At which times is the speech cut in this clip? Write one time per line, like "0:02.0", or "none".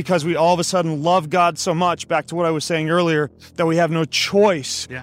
none